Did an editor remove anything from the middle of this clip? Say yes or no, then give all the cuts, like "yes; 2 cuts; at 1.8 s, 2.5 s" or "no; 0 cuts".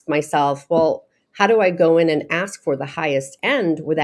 no; 0 cuts